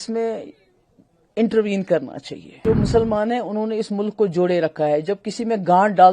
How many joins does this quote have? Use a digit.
1